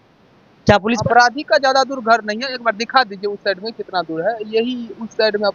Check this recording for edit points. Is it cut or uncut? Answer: cut